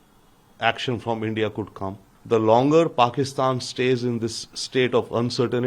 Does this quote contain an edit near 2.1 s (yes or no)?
yes